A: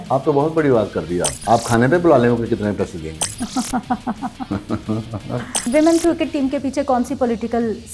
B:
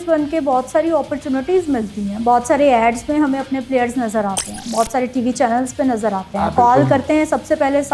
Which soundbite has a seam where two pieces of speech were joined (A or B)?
A